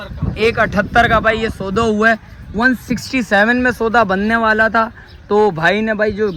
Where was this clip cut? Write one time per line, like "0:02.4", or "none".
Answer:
none